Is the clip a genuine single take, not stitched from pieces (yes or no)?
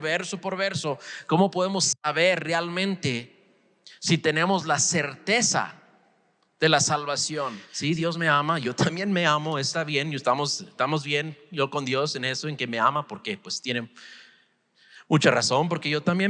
no